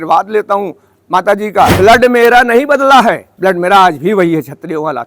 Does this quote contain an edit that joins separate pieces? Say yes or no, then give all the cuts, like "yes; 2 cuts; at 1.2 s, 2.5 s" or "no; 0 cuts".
yes; 2 cuts; at 1.7 s, 3.3 s